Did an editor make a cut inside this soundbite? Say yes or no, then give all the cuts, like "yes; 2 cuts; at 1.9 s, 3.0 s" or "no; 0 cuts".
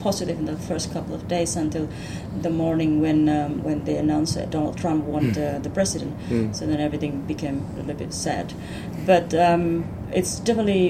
no; 0 cuts